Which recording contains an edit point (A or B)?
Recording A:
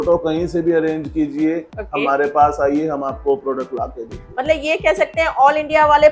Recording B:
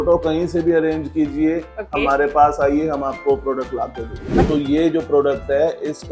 B